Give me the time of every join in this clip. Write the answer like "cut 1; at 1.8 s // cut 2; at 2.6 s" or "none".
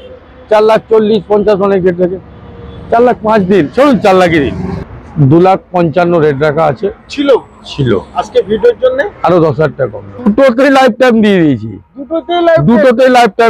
cut 1; at 4.7 s // cut 2; at 10.3 s